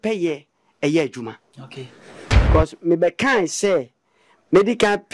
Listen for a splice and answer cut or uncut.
cut